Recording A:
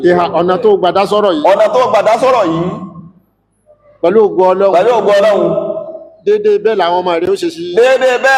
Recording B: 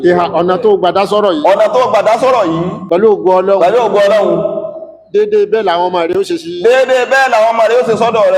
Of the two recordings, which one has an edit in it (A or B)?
B